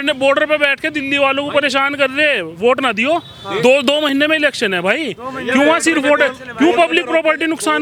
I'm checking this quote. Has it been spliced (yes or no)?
no